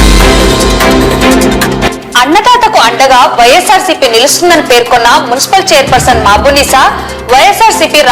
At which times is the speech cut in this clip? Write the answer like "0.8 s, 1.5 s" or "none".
1.8 s